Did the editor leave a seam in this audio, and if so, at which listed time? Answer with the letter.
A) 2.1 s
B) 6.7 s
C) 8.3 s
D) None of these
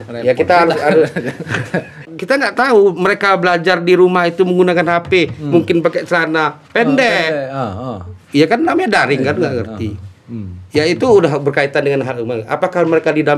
A